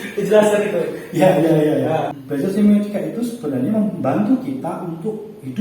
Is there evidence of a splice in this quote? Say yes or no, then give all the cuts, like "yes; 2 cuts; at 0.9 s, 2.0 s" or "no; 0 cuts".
yes; 1 cut; at 2.2 s